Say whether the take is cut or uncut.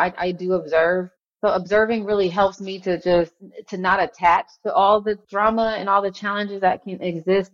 cut